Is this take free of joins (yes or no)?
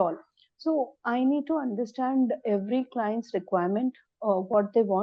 yes